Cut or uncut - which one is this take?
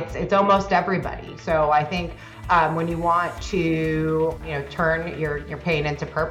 cut